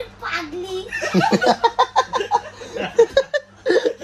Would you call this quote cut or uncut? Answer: uncut